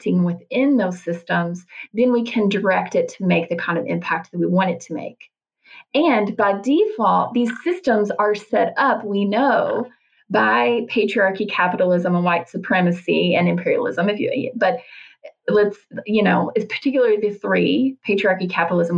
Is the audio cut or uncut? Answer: uncut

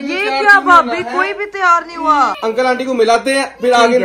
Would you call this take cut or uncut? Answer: cut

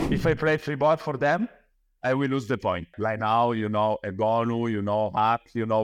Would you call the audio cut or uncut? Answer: cut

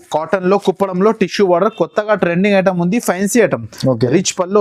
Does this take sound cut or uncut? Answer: uncut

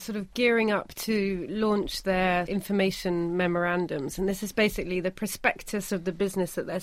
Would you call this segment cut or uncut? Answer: cut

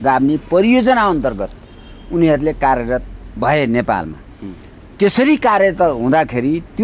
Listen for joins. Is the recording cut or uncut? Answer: uncut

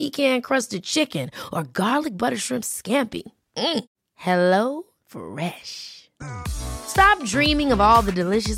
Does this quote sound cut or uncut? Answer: uncut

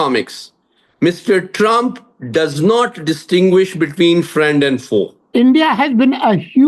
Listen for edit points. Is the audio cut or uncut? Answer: cut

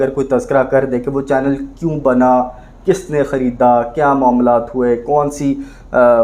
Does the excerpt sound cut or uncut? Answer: uncut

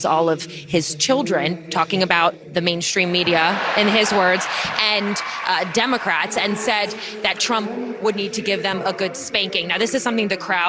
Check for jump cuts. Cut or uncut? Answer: uncut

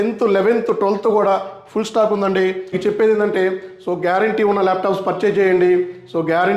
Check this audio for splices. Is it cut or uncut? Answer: cut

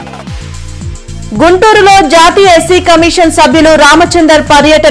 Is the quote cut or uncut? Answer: uncut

